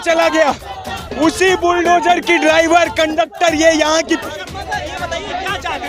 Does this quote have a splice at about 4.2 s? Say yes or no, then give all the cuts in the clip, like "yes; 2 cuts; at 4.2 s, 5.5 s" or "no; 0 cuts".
yes; 1 cut; at 4.2 s